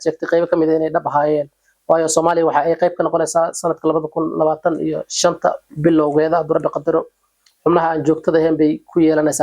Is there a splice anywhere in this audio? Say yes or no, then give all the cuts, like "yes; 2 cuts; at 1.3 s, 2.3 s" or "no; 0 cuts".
no; 0 cuts